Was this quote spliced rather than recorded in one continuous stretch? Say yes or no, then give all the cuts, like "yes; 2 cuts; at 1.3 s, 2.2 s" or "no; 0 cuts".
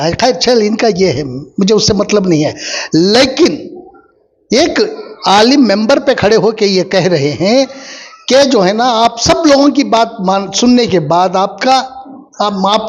no; 0 cuts